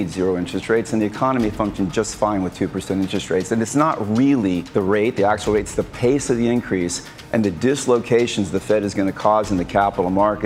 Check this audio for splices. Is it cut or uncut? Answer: cut